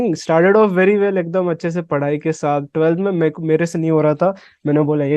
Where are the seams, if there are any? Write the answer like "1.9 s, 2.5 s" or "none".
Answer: none